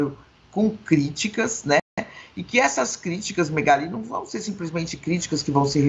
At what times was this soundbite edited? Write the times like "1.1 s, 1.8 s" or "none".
none